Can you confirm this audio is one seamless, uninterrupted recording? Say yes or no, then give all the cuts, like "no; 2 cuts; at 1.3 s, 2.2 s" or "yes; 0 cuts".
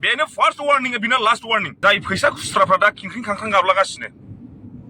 no; 1 cut; at 1.7 s